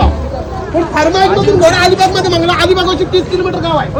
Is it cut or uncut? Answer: uncut